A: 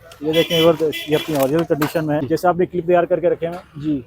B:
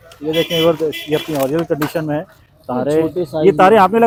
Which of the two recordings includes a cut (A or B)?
A